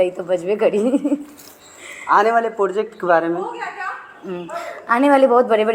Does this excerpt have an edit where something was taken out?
no; 0 cuts

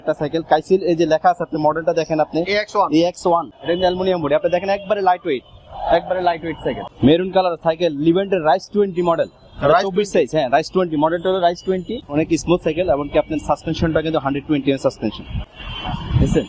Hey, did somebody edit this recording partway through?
yes; 3 cuts; at 3.5 s, 6.9 s, 12.0 s

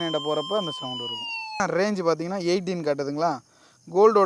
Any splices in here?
yes; 1 cut; at 1.6 s

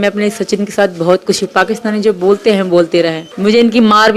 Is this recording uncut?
no; 1 cut; at 3.2 s

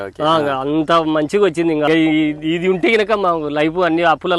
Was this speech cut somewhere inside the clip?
yes; 1 cut; at 1.9 s

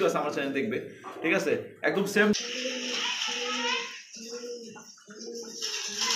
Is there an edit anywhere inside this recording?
yes; 1 cut; at 2.4 s

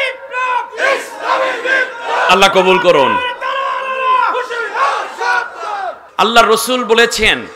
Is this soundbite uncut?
no; 1 cut; at 6.0 s

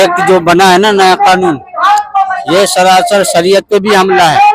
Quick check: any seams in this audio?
no; 0 cuts

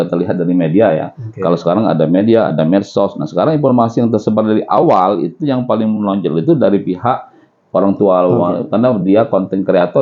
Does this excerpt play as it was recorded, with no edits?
yes; 0 cuts

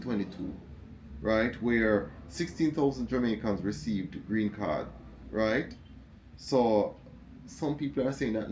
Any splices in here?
no; 0 cuts

